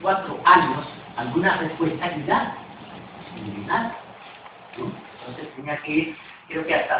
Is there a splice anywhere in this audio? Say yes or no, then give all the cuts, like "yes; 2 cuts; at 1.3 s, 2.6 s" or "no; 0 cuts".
yes; 1 cut; at 3.2 s